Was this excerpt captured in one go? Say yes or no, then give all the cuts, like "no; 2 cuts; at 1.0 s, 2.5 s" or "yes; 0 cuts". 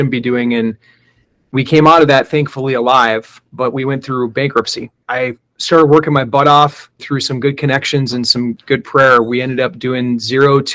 no; 3 cuts; at 5.0 s, 7.0 s, 8.6 s